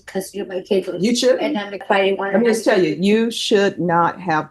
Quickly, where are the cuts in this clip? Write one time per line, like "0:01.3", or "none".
0:01.8